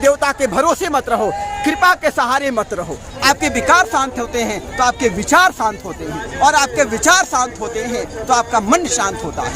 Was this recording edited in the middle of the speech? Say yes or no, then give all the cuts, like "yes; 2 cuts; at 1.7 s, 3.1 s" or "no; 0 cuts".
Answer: yes; 1 cut; at 3.0 s